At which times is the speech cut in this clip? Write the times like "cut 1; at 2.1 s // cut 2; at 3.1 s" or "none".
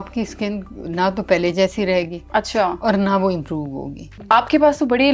none